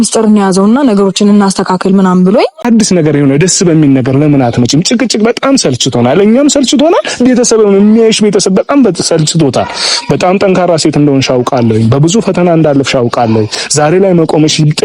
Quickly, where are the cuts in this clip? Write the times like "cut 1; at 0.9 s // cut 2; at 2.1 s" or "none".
cut 1; at 2.6 s